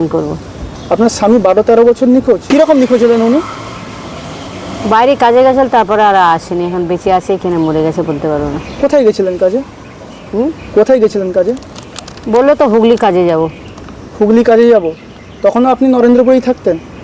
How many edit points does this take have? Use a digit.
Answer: 1